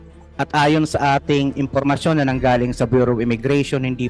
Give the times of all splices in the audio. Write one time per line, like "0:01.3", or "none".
none